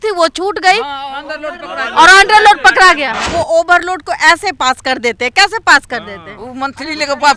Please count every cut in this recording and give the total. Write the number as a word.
one